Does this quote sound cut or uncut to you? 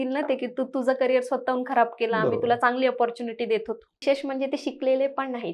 cut